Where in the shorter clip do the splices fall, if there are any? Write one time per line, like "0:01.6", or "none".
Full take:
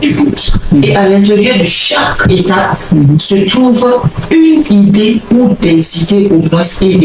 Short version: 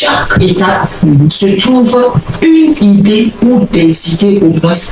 none

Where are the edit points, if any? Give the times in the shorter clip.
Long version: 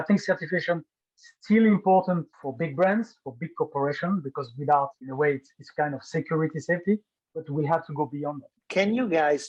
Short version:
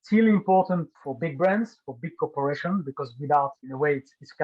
none

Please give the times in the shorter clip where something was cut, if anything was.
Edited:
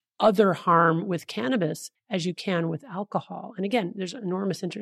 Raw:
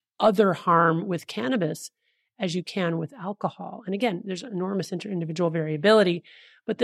0:01.9

